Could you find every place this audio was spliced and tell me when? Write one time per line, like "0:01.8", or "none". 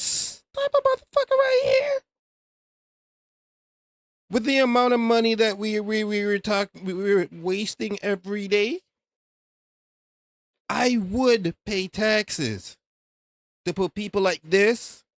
none

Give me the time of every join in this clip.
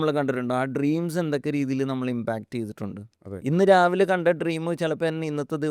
none

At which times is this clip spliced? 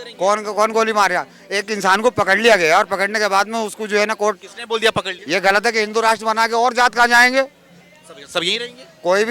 0:05.2

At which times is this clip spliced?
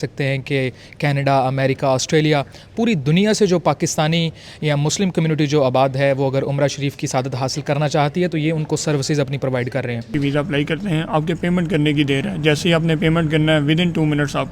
0:10.1

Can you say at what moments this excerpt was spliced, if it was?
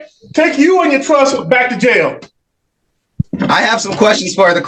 none

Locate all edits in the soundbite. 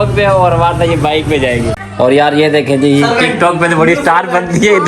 0:02.1

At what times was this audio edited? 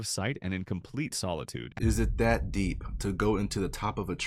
0:01.8

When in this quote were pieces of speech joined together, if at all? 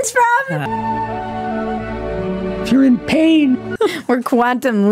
0:03.7

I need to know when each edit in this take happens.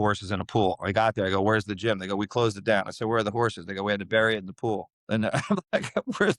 none

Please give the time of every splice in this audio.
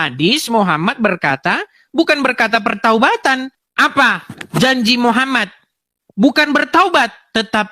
0:03.6

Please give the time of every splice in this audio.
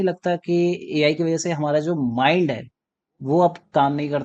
none

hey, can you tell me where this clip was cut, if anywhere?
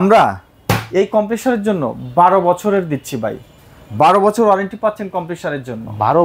none

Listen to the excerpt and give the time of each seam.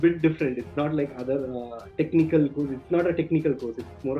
none

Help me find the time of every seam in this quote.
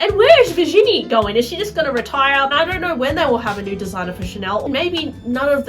0:02.5
0:04.6

